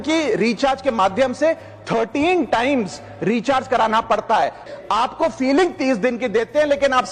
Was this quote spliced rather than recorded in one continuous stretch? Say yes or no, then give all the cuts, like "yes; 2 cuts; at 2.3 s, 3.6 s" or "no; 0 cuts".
yes; 1 cut; at 4.7 s